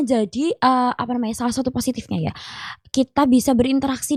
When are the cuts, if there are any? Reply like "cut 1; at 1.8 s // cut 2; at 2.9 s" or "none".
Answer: none